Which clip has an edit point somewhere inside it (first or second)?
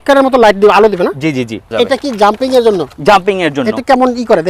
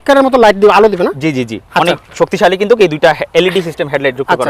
first